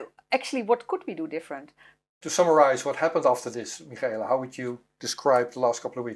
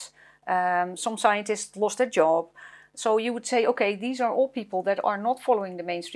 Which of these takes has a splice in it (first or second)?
first